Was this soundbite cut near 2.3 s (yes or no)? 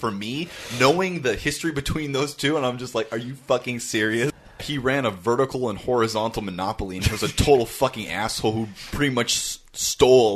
no